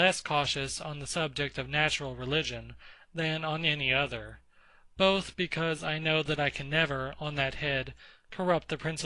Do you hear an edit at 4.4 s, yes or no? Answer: yes